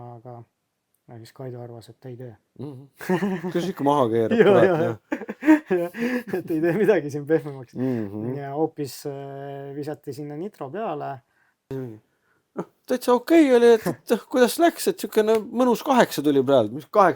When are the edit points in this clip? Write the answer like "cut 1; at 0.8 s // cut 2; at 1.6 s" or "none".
cut 1; at 11.7 s